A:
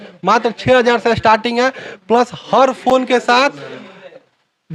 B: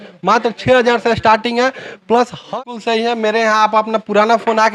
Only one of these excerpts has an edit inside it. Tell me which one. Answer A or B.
B